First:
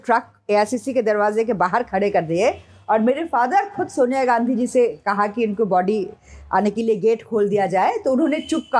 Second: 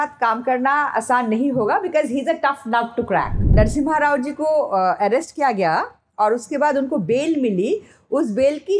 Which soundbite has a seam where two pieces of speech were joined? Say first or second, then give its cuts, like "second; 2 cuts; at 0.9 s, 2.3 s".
second; 1 cut; at 3.5 s